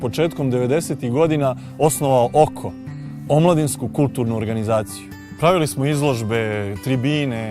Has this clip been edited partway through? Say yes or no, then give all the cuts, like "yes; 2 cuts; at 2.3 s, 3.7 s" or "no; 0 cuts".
yes; 1 cut; at 4.0 s